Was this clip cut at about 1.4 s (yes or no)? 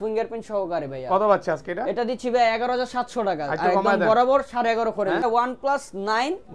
no